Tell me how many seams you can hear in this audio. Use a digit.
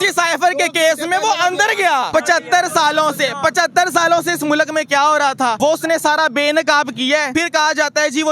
3